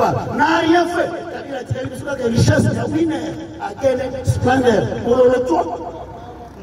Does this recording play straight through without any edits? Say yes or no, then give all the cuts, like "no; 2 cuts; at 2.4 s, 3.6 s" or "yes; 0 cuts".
yes; 0 cuts